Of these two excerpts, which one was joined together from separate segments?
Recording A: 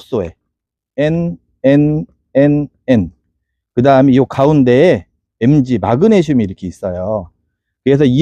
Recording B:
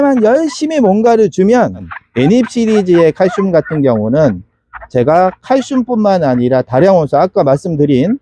B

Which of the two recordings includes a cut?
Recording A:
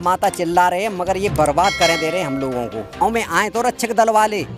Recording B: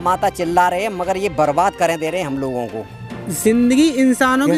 A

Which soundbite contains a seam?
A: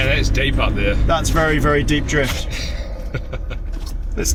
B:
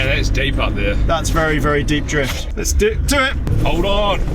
B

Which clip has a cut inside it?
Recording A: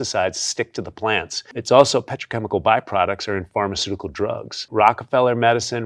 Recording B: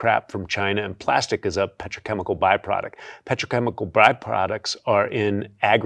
A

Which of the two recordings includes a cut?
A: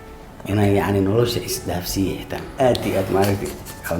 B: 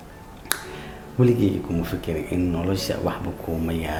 A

